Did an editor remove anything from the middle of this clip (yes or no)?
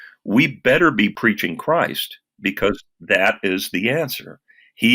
yes